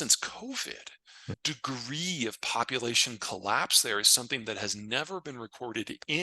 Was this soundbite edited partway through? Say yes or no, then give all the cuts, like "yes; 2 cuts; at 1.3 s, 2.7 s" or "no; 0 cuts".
yes; 1 cut; at 1.4 s